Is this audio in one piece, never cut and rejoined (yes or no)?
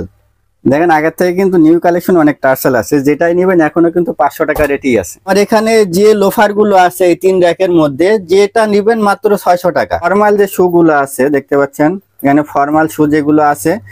no